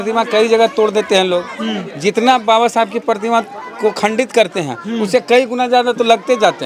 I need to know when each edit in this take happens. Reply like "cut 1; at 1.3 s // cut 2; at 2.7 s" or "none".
none